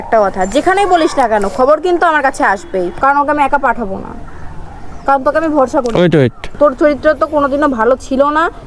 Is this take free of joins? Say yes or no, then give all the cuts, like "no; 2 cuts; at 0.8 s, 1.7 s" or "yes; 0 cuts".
no; 2 cuts; at 2.9 s, 6.5 s